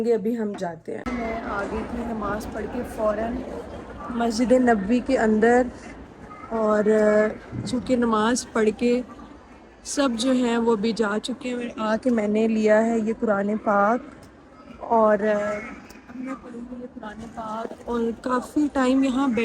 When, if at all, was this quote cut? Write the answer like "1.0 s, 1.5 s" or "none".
1.1 s